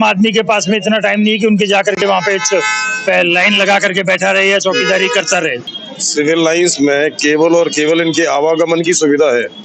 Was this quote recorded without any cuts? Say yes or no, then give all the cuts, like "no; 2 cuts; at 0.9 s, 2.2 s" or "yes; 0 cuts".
no; 1 cut; at 5.6 s